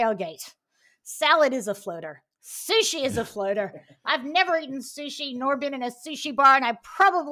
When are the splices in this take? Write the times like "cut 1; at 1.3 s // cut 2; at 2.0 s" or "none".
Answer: none